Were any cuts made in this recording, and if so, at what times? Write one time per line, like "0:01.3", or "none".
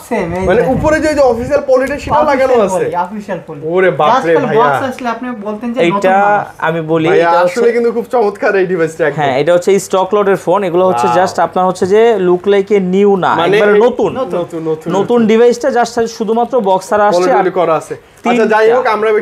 none